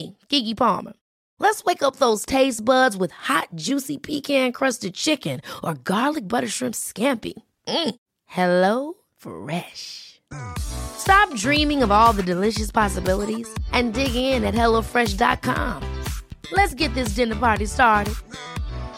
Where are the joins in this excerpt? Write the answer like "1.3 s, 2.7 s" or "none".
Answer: none